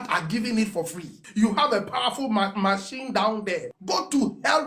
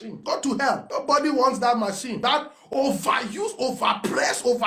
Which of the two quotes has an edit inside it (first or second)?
first